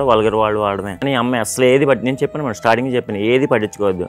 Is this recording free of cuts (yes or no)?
no